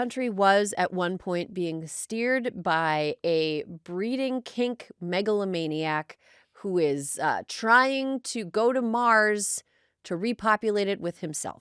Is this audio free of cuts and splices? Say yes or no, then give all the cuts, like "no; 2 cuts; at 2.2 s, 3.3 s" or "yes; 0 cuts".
yes; 0 cuts